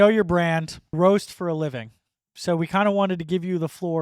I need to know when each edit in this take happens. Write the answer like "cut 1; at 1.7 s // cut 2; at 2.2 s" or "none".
cut 1; at 0.9 s